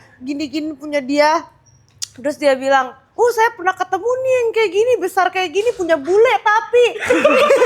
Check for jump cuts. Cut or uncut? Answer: uncut